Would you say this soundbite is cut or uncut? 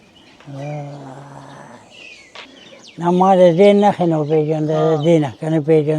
cut